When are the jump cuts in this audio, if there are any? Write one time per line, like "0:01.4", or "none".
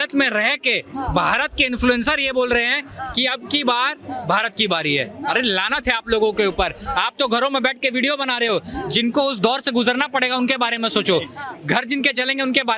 none